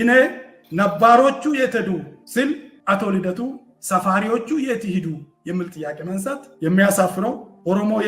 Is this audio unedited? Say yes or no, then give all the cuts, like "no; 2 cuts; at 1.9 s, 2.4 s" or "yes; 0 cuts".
no; 1 cut; at 6.4 s